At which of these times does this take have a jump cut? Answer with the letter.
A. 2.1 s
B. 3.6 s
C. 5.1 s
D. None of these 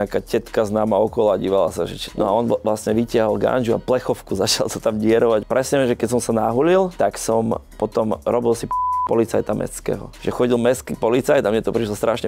A